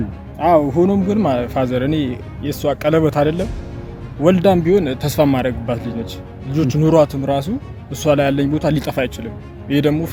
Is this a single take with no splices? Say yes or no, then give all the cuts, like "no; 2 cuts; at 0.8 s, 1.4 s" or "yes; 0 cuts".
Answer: yes; 0 cuts